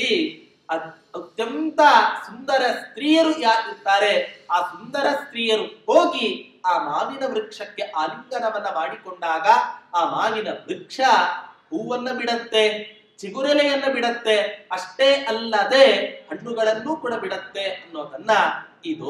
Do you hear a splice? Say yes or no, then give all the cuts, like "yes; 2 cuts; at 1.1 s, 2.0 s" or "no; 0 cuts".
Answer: no; 0 cuts